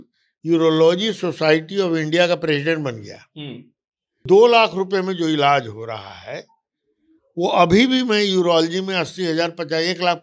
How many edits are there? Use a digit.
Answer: 1